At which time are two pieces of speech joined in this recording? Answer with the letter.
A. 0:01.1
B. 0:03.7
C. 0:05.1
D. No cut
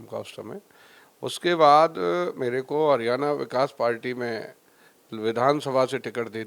D